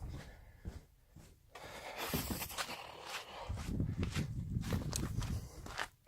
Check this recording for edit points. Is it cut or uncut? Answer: cut